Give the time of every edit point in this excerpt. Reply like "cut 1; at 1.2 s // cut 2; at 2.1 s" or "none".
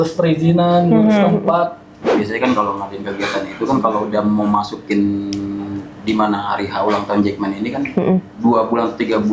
cut 1; at 2.1 s